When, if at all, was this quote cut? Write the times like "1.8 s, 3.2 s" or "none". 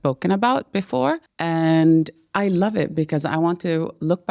1.3 s